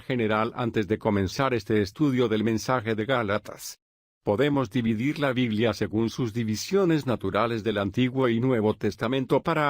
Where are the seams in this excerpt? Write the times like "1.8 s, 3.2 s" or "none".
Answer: 2.6 s